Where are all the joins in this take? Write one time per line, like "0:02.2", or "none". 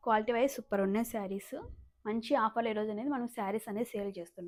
none